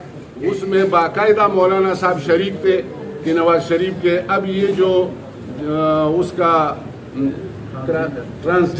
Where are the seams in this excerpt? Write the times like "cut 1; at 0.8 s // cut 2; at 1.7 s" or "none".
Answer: cut 1; at 7.3 s